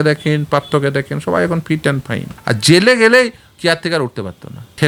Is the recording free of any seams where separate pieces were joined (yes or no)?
yes